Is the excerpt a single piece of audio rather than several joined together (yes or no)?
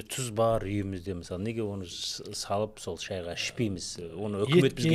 yes